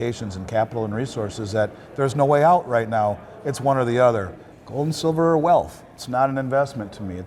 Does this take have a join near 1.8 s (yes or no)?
no